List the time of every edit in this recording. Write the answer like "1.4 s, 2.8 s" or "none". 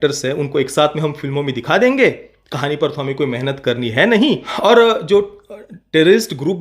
4.5 s